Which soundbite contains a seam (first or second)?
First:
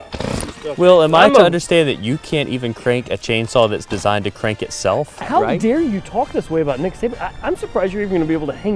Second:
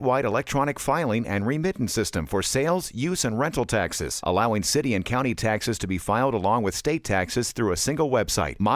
first